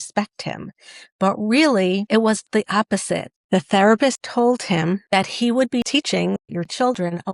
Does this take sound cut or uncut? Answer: cut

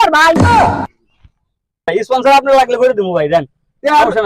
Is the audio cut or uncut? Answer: cut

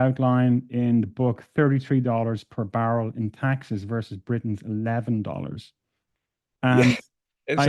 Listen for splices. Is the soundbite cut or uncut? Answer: uncut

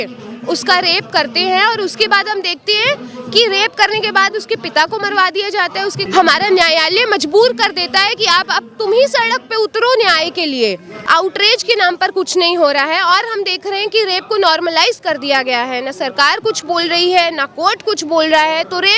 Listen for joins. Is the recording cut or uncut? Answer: cut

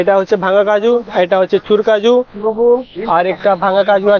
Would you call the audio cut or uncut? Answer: uncut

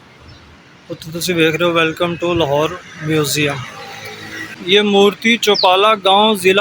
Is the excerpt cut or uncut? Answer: cut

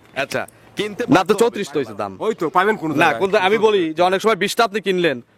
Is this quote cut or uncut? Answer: cut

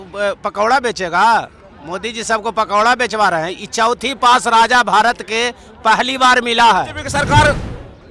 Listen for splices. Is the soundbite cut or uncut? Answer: cut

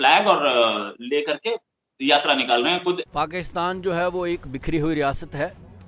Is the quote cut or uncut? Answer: cut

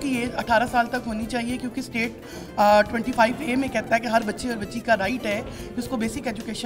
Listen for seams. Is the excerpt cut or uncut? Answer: uncut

